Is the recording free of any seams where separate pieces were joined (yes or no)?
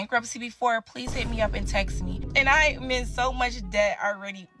no